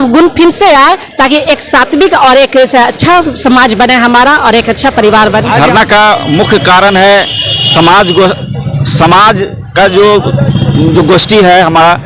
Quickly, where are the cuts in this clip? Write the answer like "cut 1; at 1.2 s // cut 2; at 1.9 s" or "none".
cut 1; at 5.6 s